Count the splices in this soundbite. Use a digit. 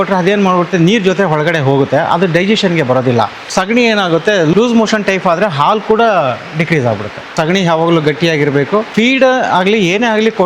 4